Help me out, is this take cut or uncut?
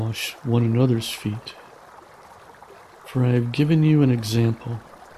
cut